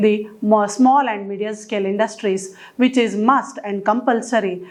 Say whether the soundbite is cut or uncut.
uncut